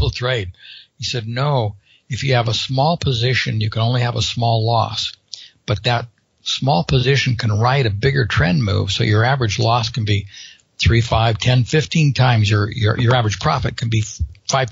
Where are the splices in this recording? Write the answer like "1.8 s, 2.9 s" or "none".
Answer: none